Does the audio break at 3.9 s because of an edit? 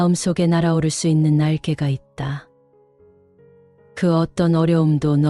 no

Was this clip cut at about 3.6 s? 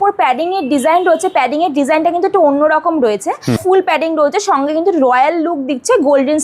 yes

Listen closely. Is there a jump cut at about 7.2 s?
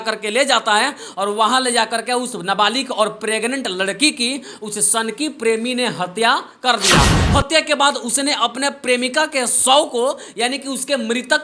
yes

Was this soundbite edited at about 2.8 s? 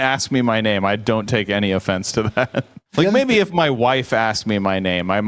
yes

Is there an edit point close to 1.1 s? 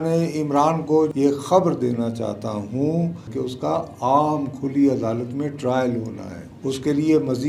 yes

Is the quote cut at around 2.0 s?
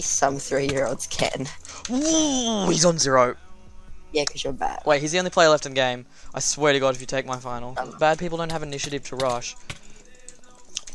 no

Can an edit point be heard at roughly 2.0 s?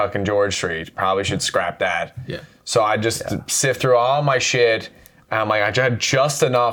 no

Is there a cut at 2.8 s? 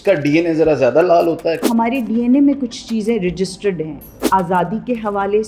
no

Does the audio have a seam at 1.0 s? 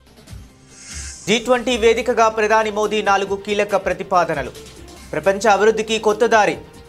yes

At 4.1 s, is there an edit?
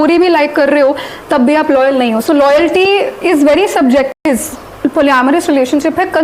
yes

